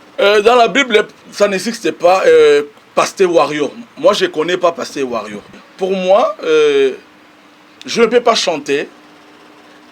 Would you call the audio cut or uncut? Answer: cut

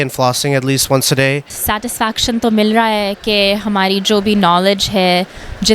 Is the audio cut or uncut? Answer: cut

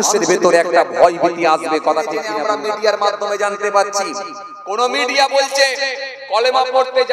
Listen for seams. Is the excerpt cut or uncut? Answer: cut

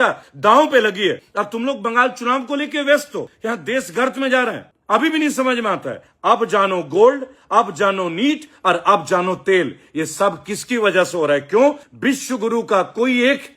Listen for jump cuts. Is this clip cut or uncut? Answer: uncut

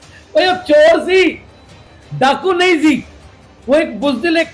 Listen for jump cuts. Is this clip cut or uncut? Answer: uncut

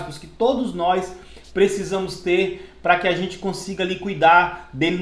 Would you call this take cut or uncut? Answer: uncut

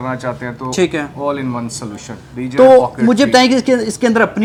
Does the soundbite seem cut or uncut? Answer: uncut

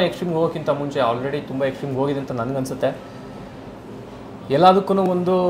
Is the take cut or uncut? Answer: uncut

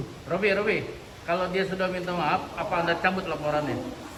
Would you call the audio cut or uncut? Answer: uncut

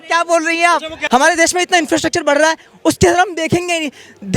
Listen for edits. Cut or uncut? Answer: cut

